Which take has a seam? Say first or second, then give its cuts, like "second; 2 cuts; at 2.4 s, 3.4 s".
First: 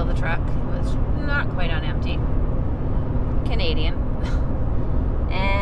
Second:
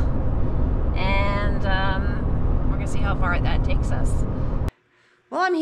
second; 1 cut; at 4.7 s